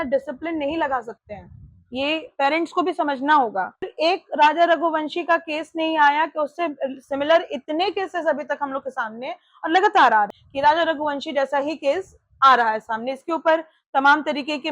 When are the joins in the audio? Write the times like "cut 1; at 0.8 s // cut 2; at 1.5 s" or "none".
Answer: cut 1; at 3.9 s // cut 2; at 10.3 s